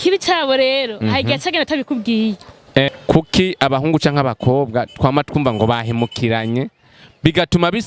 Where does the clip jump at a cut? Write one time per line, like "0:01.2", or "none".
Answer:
0:02.9